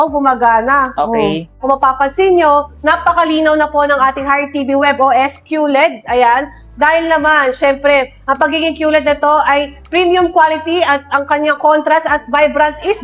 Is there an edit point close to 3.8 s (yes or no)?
no